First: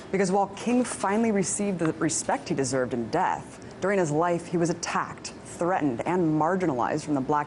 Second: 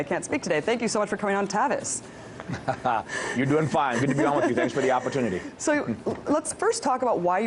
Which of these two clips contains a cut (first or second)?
second